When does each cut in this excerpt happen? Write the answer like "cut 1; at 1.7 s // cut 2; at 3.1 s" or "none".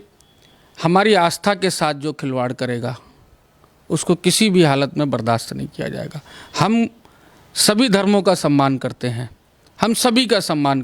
none